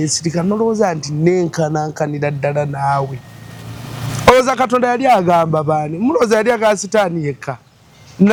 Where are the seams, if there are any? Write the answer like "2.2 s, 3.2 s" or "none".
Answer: none